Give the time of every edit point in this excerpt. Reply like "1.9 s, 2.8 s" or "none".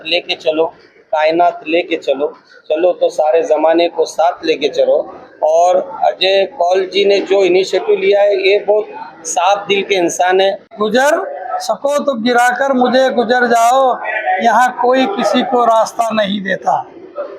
10.7 s